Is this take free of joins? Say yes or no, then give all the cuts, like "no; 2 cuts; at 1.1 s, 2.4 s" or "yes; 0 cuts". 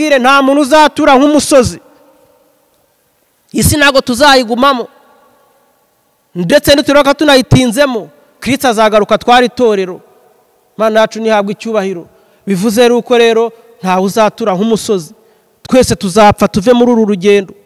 yes; 0 cuts